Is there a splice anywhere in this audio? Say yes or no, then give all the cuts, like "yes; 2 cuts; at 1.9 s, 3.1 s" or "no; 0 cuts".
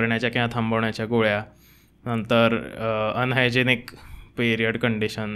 no; 0 cuts